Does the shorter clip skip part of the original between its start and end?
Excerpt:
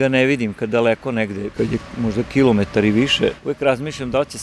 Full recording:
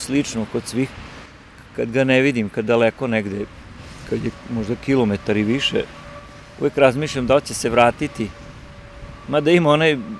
yes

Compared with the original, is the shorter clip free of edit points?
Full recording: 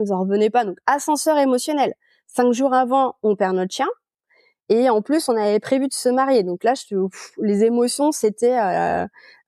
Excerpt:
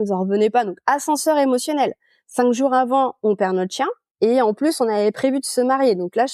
no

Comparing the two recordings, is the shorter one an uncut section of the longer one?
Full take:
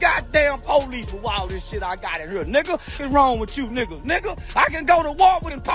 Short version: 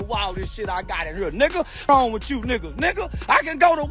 no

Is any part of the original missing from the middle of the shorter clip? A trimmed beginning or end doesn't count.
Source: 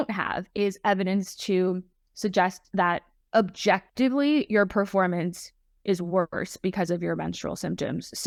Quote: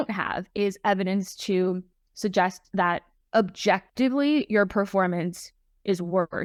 no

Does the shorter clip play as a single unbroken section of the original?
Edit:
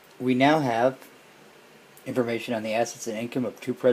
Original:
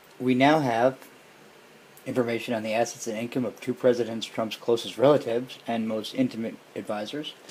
yes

